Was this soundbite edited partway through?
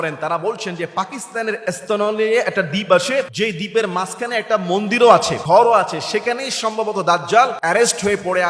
yes; 3 cuts; at 3.3 s, 5.3 s, 7.6 s

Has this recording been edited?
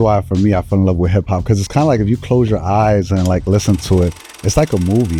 no; 0 cuts

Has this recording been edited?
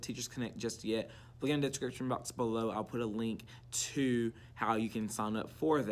no; 0 cuts

